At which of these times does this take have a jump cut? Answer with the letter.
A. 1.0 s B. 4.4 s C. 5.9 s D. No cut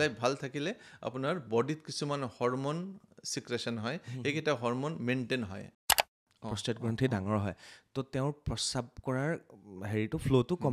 C